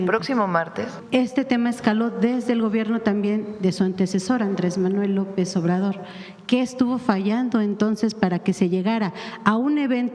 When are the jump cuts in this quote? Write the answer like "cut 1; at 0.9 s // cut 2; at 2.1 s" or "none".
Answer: cut 1; at 0.9 s